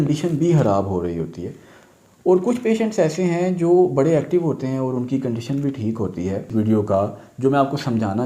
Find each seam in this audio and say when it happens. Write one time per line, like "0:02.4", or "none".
0:06.5